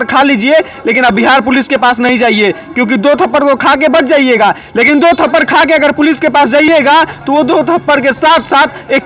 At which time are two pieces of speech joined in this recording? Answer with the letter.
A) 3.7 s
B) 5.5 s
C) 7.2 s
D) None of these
D